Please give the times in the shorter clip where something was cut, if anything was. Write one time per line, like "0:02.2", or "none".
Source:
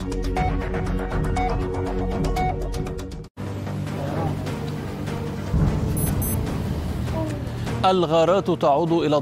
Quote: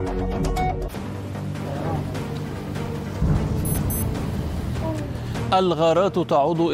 0:00.9